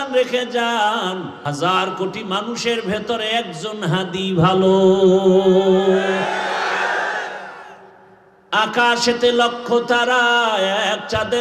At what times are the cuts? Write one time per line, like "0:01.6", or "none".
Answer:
0:01.4